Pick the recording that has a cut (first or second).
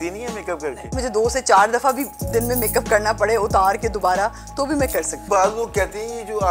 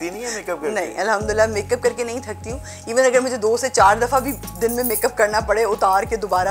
first